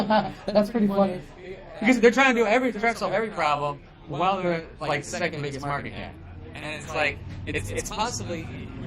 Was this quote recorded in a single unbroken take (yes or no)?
yes